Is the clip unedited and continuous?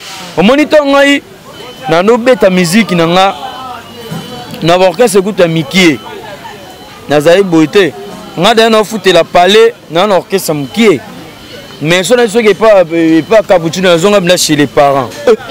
yes; 0 cuts

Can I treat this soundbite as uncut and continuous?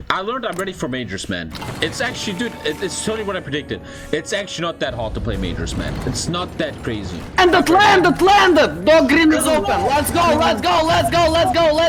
yes; 0 cuts

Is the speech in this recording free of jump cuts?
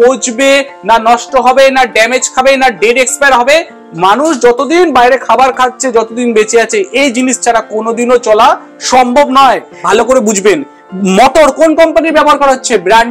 no; 2 cuts; at 3.8 s, 9.7 s

